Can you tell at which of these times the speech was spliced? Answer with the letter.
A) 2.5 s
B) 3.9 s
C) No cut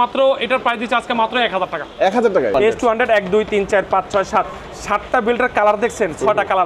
A